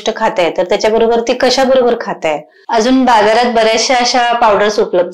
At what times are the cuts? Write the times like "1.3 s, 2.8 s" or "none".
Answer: 2.5 s